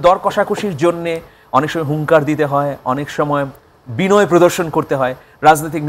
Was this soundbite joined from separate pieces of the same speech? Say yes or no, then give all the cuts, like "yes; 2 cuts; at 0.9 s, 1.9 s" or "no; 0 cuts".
no; 0 cuts